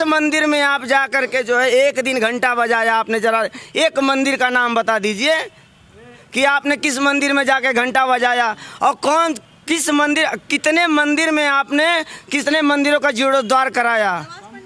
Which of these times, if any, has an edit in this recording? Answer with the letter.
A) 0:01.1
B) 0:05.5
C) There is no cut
C